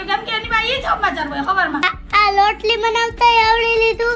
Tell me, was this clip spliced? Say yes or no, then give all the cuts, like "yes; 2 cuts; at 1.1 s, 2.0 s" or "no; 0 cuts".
yes; 1 cut; at 1.9 s